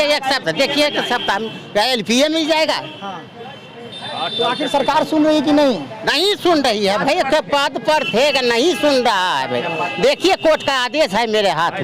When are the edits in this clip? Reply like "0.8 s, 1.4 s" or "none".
none